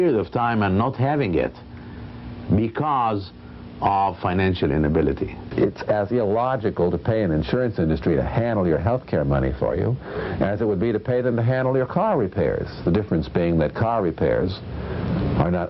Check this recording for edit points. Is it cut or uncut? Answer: cut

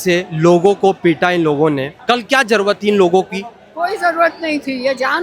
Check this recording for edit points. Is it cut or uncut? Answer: cut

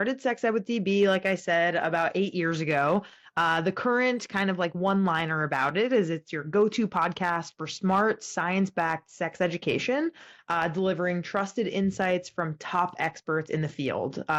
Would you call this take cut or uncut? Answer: uncut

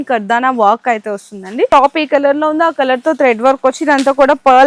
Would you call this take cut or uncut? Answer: cut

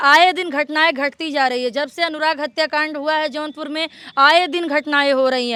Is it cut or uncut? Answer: uncut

